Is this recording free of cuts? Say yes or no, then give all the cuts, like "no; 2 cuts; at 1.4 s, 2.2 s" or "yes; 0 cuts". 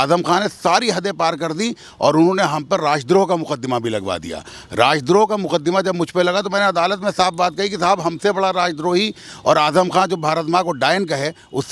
yes; 0 cuts